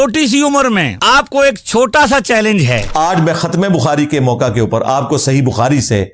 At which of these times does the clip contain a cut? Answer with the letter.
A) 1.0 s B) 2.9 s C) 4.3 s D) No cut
B